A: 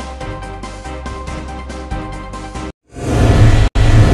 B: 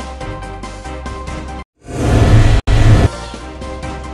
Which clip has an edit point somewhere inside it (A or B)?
A